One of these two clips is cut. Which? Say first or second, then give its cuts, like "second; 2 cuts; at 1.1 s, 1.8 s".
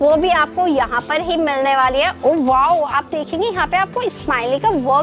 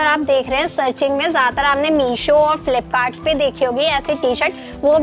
first; 1 cut; at 2.1 s